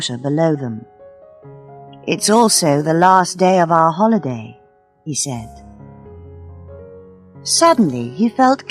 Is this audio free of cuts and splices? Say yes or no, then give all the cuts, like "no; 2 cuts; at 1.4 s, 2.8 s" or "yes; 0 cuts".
no; 2 cuts; at 5.8 s, 7.4 s